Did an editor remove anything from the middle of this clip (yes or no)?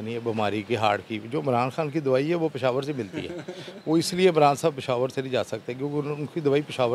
no